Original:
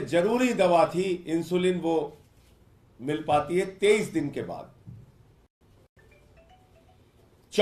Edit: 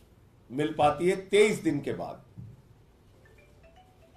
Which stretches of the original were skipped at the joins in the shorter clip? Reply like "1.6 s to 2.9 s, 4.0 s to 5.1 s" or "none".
5.6 s to 5.9 s